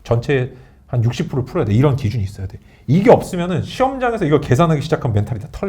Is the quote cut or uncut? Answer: uncut